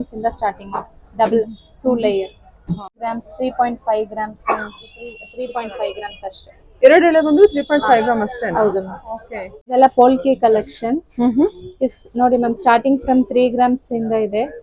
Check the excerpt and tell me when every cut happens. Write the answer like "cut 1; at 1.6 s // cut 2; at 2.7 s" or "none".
cut 1; at 3.0 s // cut 2; at 5.2 s // cut 3; at 9.5 s